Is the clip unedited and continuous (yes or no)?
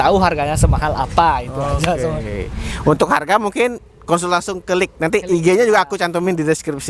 yes